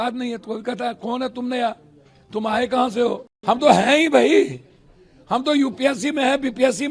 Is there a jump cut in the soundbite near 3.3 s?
yes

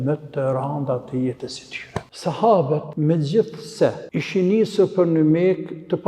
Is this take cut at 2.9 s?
yes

